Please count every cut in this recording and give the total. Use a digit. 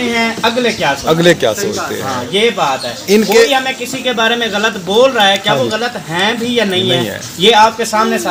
0